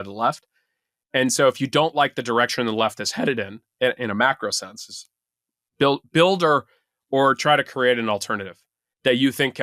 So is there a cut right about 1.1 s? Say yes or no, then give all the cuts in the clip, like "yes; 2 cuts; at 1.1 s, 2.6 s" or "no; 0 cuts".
no; 0 cuts